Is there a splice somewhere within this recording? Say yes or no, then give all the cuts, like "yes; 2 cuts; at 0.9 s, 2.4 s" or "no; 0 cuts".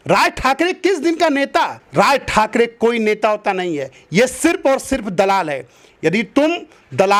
no; 0 cuts